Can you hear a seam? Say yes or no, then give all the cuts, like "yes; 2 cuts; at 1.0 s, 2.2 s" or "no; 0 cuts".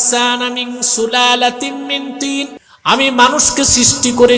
yes; 1 cut; at 2.6 s